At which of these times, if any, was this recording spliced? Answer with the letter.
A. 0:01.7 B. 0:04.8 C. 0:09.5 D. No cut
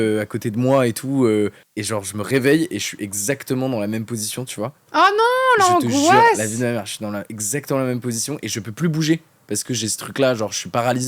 A